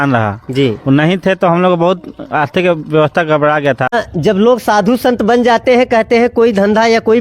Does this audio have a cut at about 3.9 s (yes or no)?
yes